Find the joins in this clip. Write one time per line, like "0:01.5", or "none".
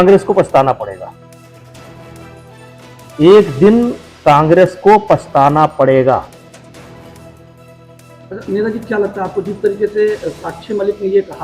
0:01.1
0:02.7